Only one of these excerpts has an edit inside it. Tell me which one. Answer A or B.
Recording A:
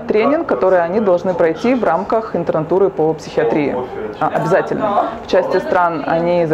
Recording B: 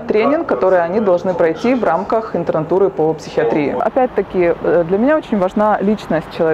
B